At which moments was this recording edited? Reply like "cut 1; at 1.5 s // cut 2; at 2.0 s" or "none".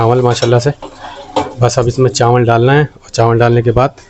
none